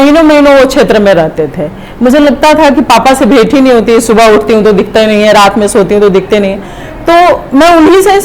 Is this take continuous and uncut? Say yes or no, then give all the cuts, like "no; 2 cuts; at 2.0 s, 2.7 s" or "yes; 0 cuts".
yes; 0 cuts